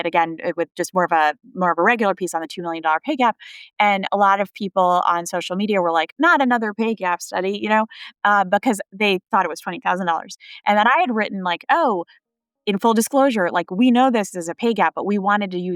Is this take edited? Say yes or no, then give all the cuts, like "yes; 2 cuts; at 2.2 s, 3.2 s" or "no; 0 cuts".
no; 0 cuts